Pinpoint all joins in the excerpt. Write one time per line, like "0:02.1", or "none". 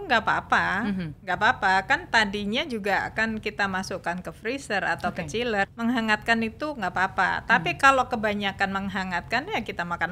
0:05.7